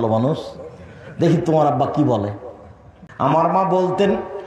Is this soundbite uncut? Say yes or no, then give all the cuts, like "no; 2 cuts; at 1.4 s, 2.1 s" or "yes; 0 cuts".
no; 1 cut; at 3.4 s